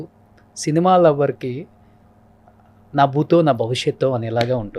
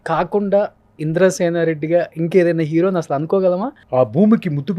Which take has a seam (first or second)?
second